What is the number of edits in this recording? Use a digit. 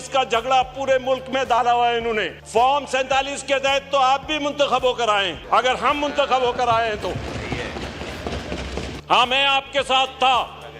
3